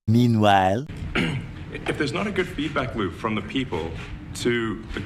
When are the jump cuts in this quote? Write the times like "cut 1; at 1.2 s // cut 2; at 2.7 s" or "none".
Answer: cut 1; at 0.9 s